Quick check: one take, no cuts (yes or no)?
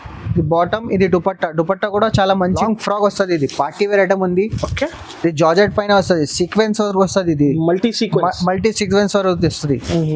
no